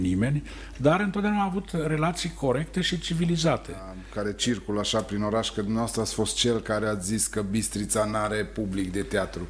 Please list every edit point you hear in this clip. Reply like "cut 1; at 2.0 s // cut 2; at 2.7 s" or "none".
cut 1; at 4.0 s